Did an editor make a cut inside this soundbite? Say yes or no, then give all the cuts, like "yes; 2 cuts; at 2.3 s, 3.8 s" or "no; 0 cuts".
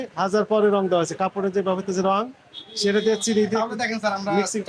no; 0 cuts